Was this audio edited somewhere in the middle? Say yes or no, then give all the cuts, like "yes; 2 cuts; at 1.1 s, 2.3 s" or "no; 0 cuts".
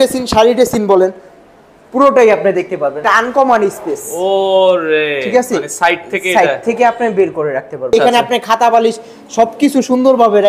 yes; 2 cuts; at 3.0 s, 7.9 s